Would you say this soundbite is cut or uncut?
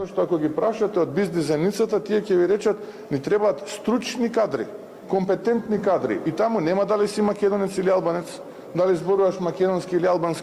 uncut